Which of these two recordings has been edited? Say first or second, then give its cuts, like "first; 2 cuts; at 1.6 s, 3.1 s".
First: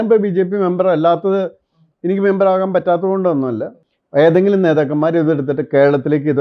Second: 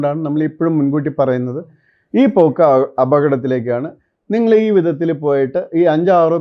first; 1 cut; at 3.7 s